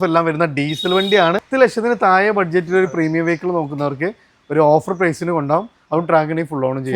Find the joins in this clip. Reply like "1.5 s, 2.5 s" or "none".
1.4 s